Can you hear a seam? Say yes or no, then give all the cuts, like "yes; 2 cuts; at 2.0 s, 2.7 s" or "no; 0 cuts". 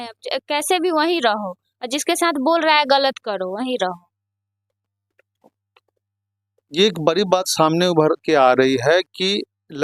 no; 0 cuts